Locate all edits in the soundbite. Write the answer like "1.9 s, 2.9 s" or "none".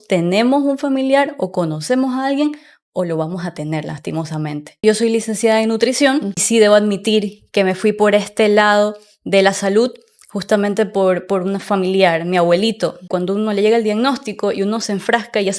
4.8 s, 6.4 s, 13.1 s